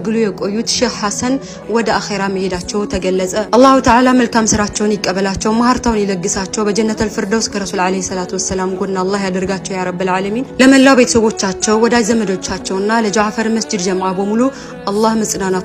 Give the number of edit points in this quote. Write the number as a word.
zero